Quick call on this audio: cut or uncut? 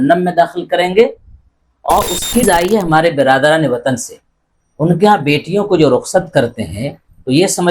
cut